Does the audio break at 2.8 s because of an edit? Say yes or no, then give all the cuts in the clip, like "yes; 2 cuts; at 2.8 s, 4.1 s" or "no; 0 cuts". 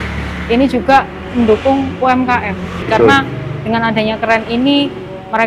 yes; 1 cut; at 2.8 s